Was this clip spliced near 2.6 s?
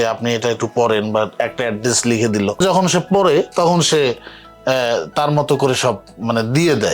yes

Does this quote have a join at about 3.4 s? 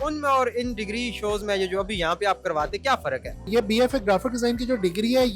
yes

